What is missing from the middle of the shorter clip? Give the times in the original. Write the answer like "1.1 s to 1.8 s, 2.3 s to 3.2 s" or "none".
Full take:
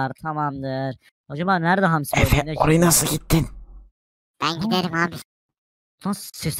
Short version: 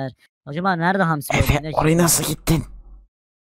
none